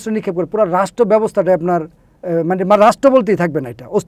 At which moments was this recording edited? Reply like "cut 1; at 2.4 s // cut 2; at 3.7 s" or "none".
none